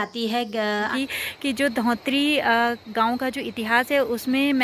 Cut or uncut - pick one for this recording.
cut